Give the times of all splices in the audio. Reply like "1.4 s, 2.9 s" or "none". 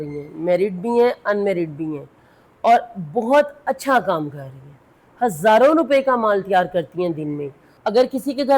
7.6 s